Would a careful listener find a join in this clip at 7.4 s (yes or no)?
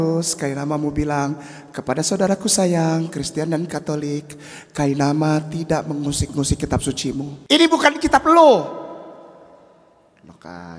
yes